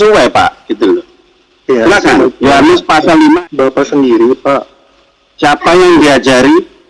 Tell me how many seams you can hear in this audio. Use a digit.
1